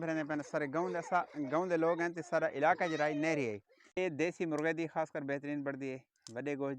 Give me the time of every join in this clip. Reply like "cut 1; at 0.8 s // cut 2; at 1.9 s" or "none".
cut 1; at 4.0 s